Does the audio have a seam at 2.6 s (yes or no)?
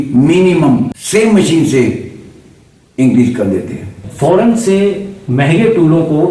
no